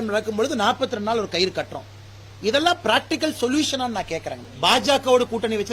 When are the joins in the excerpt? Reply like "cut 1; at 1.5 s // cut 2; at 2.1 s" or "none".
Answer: cut 1; at 4.4 s

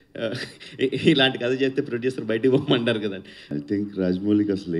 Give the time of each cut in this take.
cut 1; at 3.5 s

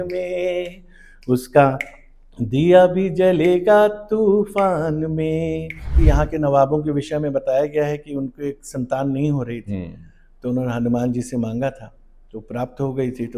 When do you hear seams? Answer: cut 1; at 5.9 s

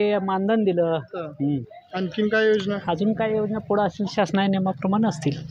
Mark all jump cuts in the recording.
none

